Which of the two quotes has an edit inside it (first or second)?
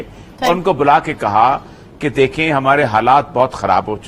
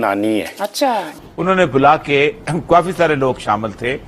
second